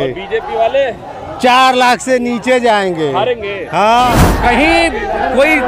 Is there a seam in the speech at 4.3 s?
yes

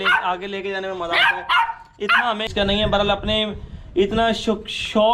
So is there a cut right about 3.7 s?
no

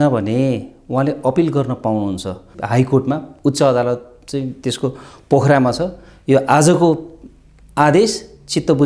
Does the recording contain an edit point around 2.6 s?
yes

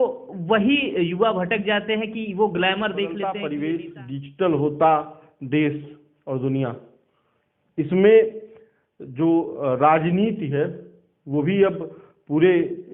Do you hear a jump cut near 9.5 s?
no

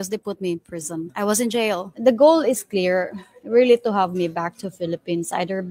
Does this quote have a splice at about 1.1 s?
yes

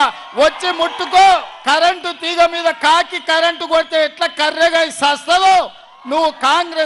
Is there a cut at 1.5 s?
yes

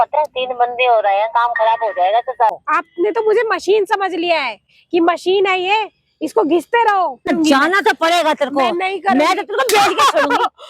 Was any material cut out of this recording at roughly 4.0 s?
no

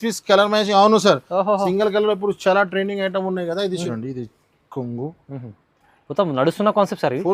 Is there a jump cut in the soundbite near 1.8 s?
no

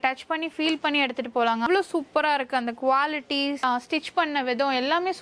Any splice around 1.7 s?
yes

